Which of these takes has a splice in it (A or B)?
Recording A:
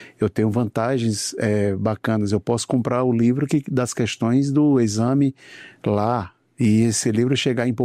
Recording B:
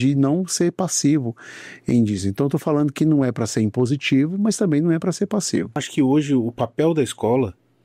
B